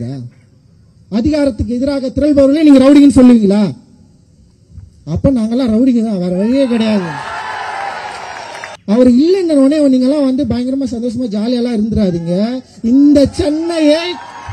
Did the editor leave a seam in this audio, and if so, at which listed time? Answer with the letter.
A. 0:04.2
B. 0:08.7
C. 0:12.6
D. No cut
B